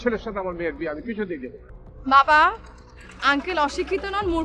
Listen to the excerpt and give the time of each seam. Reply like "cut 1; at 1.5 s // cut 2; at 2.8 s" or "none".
cut 1; at 1.6 s